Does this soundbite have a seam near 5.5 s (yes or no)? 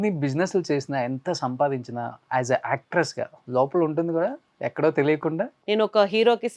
yes